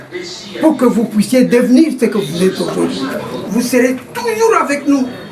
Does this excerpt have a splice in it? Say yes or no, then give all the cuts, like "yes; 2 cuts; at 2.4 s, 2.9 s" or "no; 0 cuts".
yes; 1 cut; at 3.3 s